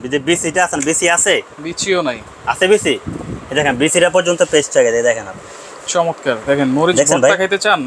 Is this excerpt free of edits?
yes; 0 cuts

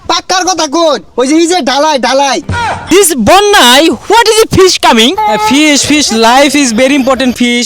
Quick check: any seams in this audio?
yes; 1 cut; at 2.9 s

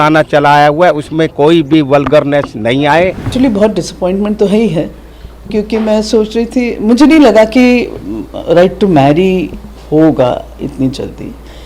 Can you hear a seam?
yes; 1 cut; at 3.3 s

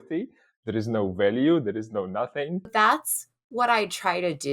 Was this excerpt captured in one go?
no; 1 cut; at 2.7 s

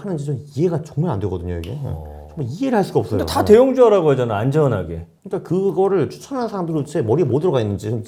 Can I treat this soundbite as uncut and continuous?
yes; 0 cuts

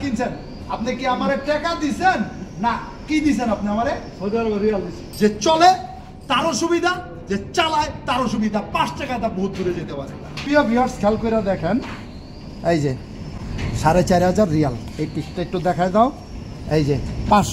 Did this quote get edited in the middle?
yes; 2 cuts; at 5.0 s, 10.3 s

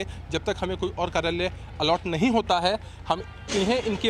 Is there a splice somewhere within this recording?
no; 0 cuts

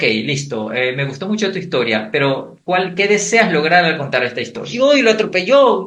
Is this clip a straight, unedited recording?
no; 1 cut; at 4.7 s

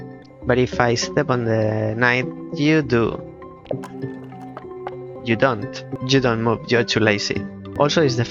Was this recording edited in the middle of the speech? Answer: yes; 2 cuts; at 5.2 s, 5.9 s

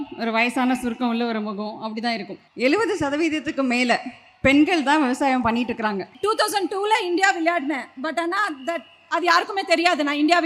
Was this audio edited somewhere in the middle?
yes; 2 cuts; at 2.3 s, 6.1 s

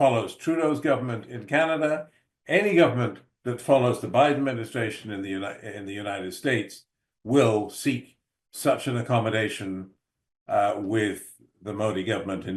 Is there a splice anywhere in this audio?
no; 0 cuts

